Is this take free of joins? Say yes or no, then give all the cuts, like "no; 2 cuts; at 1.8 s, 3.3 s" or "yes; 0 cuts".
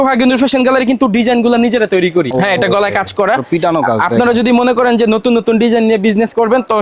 yes; 0 cuts